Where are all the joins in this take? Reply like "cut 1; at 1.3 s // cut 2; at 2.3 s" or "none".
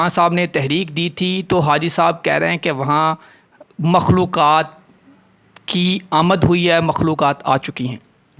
none

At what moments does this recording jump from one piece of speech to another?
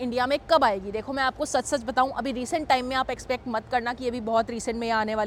none

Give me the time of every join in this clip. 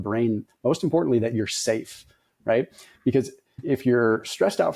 cut 1; at 3.6 s

